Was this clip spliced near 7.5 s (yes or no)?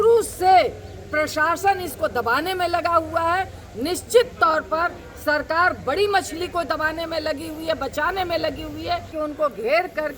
no